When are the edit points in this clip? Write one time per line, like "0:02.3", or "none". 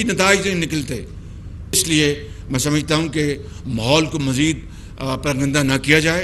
0:01.8